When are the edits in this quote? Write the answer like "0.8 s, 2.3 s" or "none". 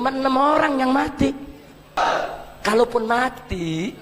2.0 s